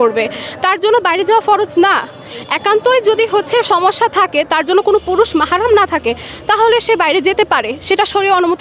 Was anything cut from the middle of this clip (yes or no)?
no